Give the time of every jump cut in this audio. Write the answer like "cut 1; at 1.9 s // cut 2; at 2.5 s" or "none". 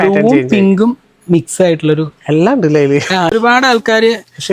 cut 1; at 3.3 s